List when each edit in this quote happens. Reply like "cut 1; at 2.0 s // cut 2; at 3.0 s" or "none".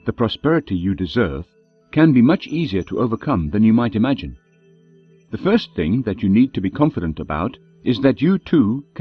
cut 1; at 8.1 s